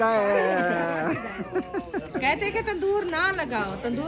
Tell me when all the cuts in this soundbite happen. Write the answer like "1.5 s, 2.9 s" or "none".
1.4 s